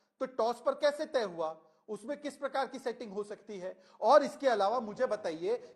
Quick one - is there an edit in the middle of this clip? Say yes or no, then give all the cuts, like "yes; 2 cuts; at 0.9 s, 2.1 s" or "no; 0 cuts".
no; 0 cuts